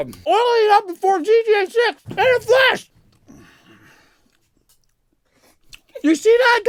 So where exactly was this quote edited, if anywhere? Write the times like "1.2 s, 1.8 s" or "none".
none